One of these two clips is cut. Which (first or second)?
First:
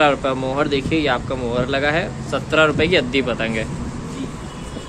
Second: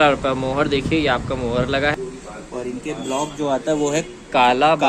second